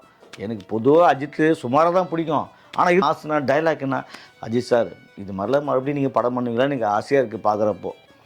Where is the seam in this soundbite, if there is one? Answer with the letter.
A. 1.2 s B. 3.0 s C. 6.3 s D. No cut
B